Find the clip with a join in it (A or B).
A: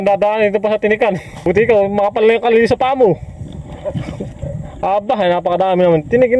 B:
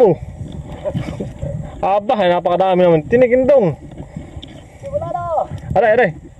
A